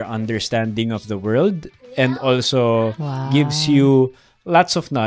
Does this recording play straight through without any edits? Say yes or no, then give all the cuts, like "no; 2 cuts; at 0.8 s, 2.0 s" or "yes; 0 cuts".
yes; 0 cuts